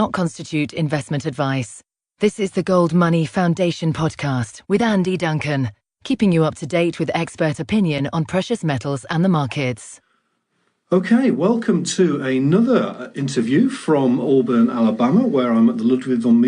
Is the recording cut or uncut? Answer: cut